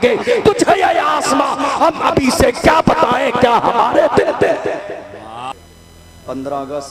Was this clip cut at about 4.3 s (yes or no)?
no